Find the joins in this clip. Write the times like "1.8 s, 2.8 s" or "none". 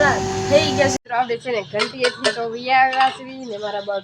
1.0 s